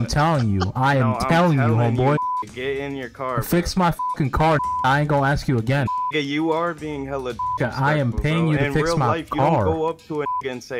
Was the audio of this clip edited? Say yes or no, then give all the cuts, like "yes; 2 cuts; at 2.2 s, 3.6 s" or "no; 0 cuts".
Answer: yes; 1 cut; at 5.9 s